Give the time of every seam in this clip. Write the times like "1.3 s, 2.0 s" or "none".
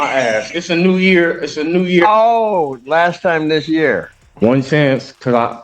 4.2 s